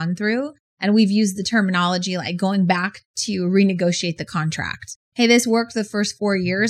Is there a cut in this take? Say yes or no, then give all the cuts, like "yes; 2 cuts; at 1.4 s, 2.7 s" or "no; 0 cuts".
yes; 1 cut; at 5.0 s